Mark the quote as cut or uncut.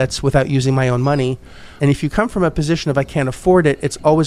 cut